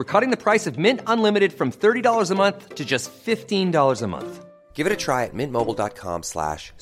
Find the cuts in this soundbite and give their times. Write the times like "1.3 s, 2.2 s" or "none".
none